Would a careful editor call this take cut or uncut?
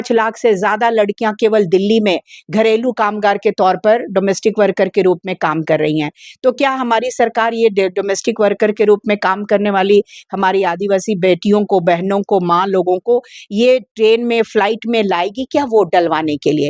uncut